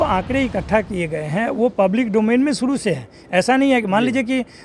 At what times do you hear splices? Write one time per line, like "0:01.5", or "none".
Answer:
none